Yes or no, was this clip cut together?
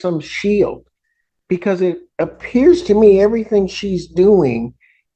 no